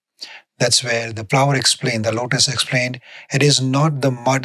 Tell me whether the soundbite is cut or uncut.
cut